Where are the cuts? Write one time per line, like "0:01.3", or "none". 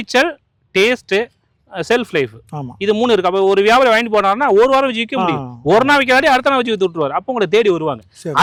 none